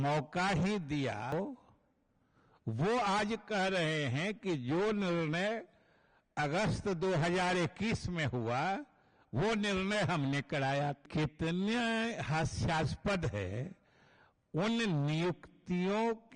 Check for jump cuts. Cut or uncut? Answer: cut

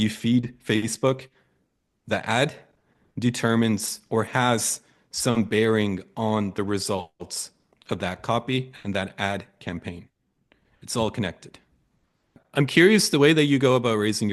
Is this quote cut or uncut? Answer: cut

